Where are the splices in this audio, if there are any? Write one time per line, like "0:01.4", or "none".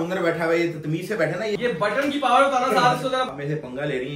0:01.6
0:03.3